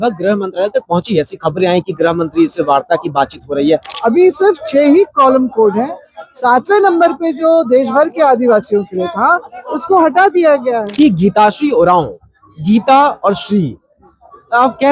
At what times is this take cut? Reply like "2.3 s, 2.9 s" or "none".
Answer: 3.9 s, 10.8 s

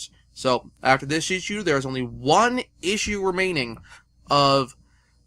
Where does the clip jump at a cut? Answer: 4.2 s

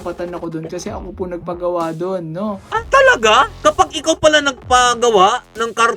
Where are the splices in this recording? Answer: none

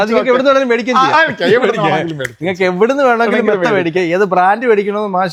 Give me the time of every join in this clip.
none

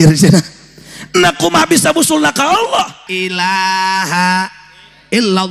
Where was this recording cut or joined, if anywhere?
3.1 s

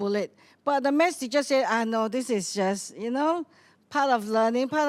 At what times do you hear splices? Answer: none

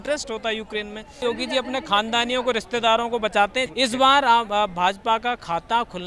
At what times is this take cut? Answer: 1.2 s, 3.7 s

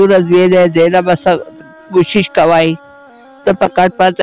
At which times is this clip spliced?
none

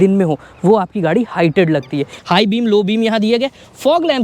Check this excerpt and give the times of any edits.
2.1 s

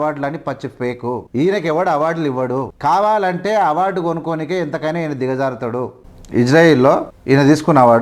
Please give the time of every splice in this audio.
1.2 s, 2.7 s, 6.1 s, 7.1 s

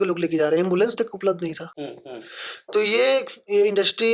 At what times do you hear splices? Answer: none

